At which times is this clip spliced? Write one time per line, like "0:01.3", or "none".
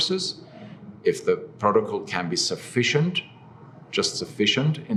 none